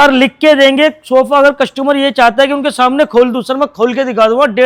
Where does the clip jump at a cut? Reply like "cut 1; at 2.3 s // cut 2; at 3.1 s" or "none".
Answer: none